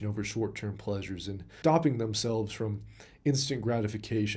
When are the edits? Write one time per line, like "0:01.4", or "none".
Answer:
0:01.5